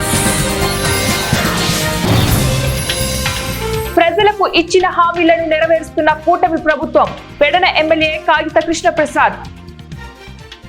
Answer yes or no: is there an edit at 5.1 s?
no